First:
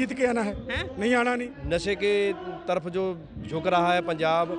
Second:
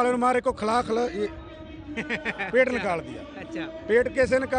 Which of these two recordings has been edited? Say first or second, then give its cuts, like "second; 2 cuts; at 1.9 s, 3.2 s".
first; 1 cut; at 1.5 s